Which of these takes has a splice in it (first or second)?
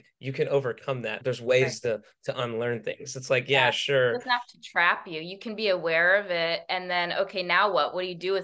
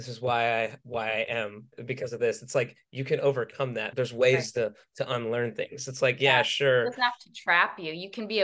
second